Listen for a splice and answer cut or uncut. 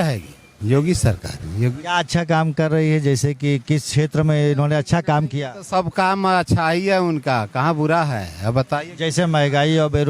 uncut